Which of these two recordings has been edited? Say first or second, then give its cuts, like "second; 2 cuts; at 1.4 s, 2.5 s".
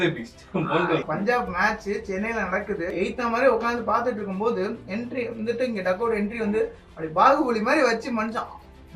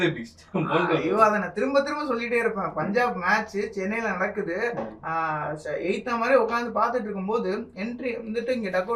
first; 2 cuts; at 1.0 s, 2.9 s